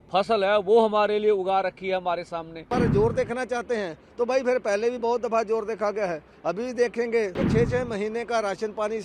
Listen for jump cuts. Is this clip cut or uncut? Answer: cut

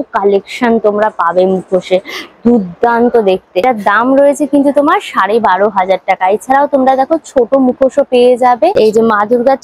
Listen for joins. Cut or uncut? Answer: uncut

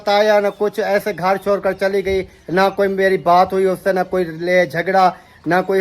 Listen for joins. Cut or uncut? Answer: uncut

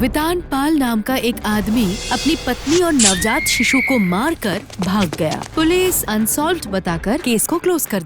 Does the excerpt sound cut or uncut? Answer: cut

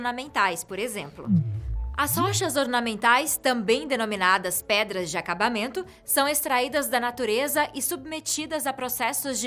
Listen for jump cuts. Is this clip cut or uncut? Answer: cut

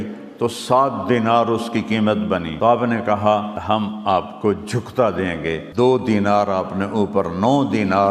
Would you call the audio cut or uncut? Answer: cut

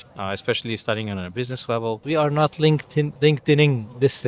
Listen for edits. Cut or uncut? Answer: cut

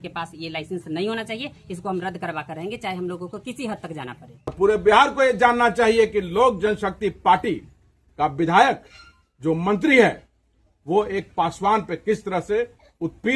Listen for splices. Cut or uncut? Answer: cut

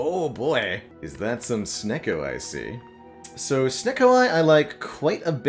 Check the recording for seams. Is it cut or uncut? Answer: uncut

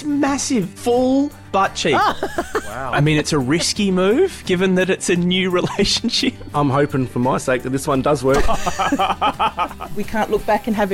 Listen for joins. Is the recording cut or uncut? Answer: uncut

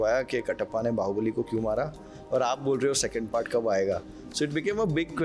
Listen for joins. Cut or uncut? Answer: uncut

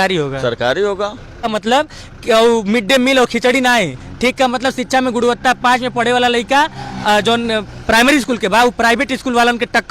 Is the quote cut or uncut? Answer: cut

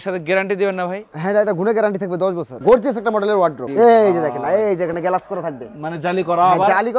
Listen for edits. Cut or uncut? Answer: cut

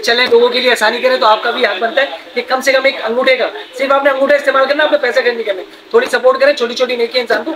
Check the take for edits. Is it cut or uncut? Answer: uncut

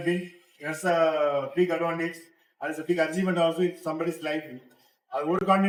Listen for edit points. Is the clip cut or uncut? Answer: uncut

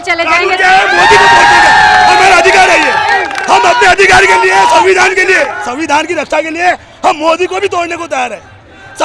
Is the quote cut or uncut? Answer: cut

